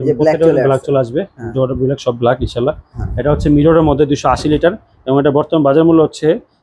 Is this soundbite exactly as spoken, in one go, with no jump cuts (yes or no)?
yes